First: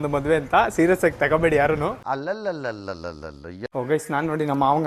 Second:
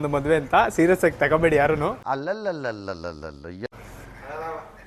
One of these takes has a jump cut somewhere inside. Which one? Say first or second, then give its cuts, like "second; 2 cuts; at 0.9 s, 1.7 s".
first; 1 cut; at 3.6 s